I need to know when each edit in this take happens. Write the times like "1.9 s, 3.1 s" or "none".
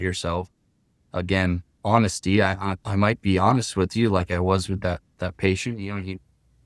1.7 s